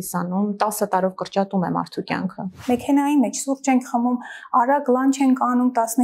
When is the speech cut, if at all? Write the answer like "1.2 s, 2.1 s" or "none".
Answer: 2.6 s